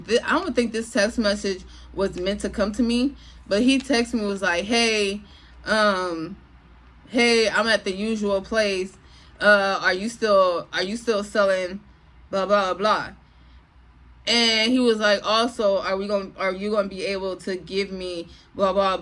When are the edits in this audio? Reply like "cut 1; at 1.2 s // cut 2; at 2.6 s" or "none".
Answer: none